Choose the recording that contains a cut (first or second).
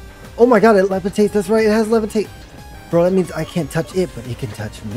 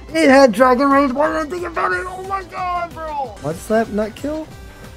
second